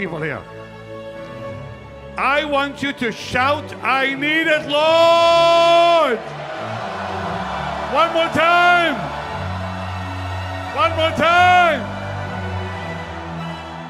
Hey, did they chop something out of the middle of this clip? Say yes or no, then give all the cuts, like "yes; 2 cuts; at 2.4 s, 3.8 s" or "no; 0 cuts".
no; 0 cuts